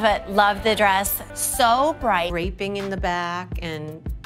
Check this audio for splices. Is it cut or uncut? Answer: cut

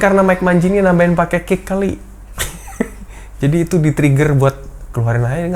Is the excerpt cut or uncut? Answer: uncut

